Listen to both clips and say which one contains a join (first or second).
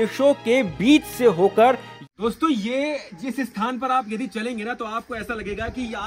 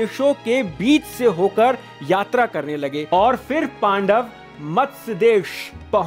first